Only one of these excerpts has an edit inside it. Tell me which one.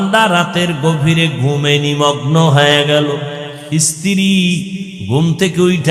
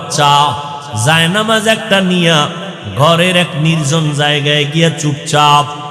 first; 1 cut; at 3.5 s

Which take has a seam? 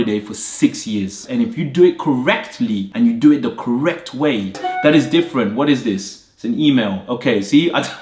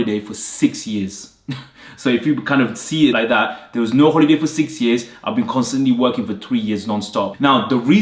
first; 2 cuts; at 1.2 s, 4.6 s

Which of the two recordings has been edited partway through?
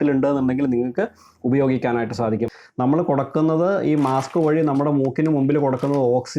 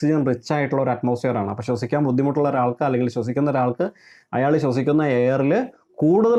first; 1 cut; at 2.6 s

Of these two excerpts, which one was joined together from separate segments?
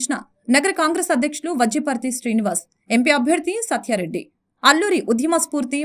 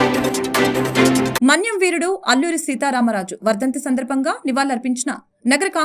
second; 1 cut; at 1.3 s

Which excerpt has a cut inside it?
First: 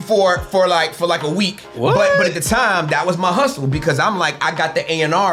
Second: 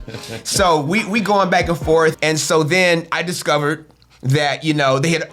second; 1 cut; at 2.2 s

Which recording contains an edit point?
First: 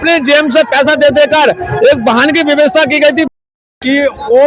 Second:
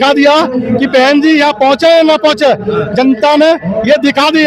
first; 1 cut; at 3.3 s

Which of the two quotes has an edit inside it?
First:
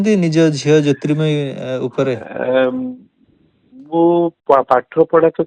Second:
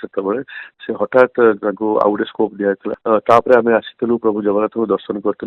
second; 1 cut; at 2.9 s

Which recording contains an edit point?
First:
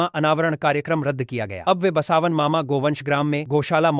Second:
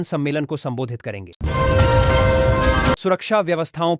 second; 2 cuts; at 1.4 s, 3.0 s

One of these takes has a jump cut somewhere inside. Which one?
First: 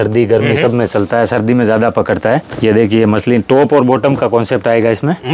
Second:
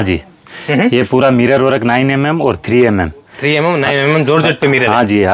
first; 1 cut; at 2.5 s

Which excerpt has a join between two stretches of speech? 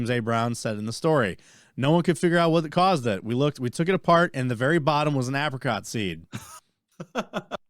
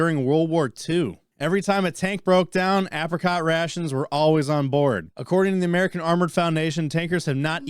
second; 2 cuts; at 1.2 s, 5.1 s

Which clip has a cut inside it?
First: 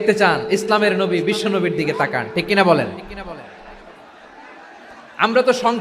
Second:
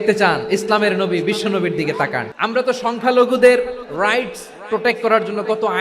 second; 1 cut; at 2.3 s

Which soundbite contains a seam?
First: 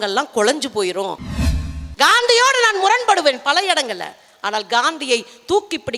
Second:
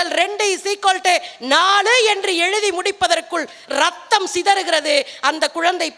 first; 1 cut; at 1.4 s

